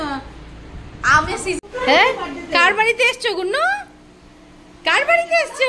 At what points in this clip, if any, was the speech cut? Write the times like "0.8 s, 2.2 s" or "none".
1.7 s